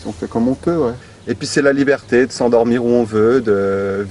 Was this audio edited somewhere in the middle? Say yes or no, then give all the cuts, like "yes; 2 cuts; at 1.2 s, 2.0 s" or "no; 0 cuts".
yes; 1 cut; at 1.0 s